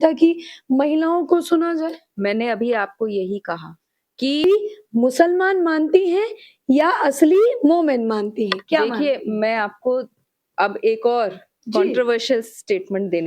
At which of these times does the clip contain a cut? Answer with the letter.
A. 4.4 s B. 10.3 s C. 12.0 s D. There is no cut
A